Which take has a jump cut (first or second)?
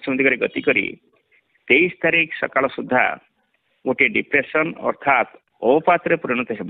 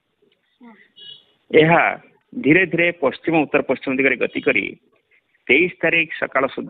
first